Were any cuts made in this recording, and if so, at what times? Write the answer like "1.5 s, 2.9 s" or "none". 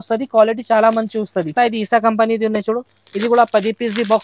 1.5 s